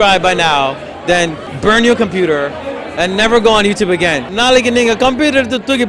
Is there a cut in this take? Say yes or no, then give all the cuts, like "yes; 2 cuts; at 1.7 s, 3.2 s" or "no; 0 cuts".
yes; 2 cuts; at 1.5 s, 4.3 s